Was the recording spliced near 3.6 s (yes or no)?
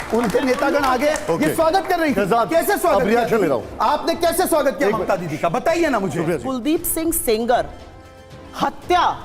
no